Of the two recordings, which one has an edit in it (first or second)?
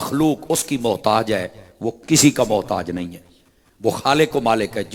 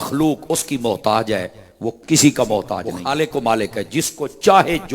second